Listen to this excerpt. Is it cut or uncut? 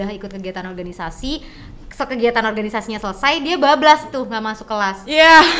uncut